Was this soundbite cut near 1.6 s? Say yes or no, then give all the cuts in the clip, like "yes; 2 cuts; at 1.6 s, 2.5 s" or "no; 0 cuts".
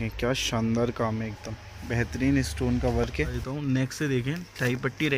no; 1 cut; at 3.4 s